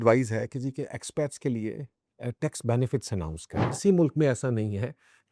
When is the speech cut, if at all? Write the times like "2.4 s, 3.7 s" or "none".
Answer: 3.7 s